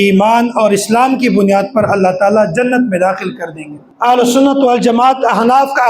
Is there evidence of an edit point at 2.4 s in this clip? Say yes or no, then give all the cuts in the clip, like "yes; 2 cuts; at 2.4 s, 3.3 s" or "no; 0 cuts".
no; 1 cut; at 3.9 s